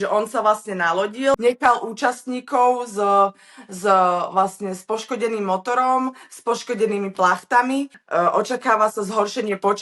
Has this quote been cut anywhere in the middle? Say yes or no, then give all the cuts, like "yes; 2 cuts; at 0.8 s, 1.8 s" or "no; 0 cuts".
yes; 2 cuts; at 1.4 s, 8.0 s